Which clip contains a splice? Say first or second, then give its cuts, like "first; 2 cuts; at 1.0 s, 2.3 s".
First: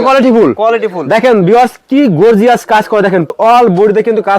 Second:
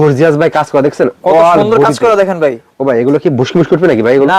first; 1 cut; at 3.3 s